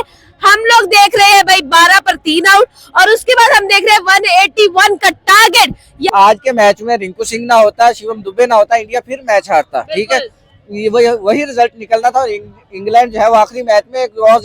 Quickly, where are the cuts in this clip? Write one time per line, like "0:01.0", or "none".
0:05.9